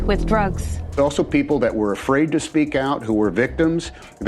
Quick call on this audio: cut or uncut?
cut